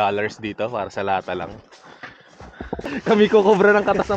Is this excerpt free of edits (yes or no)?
no